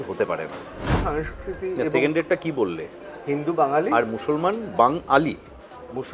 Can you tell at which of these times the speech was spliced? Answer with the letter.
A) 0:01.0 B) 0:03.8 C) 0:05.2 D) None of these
A